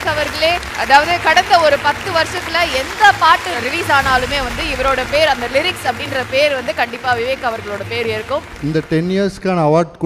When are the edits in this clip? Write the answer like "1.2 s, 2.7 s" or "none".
8.5 s